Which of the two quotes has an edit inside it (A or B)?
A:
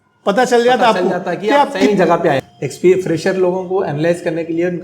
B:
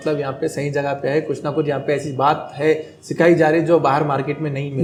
A